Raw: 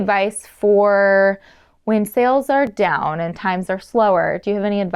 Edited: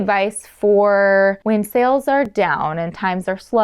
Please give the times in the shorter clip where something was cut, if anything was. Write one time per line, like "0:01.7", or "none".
0:01.4